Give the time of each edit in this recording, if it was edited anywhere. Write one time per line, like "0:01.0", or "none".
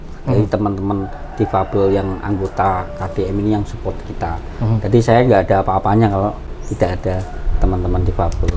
none